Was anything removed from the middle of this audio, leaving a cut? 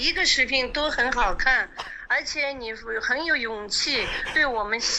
no; 0 cuts

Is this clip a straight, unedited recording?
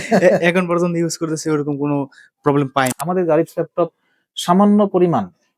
no; 1 cut; at 2.9 s

